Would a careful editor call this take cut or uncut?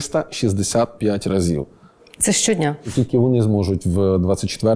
cut